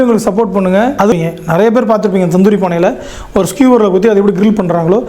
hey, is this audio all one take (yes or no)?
no